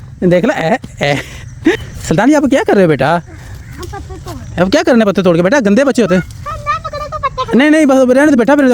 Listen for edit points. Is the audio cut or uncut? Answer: cut